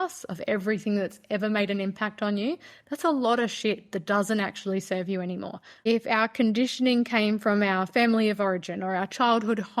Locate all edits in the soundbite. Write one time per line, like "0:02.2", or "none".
0:05.9